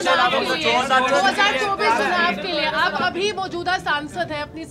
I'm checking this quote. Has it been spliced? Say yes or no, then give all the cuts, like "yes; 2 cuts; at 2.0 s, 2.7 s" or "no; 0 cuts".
no; 0 cuts